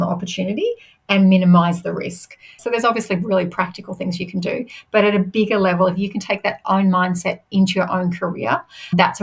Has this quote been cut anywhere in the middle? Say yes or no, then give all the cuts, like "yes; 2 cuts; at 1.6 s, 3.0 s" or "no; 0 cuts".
yes; 1 cut; at 2.6 s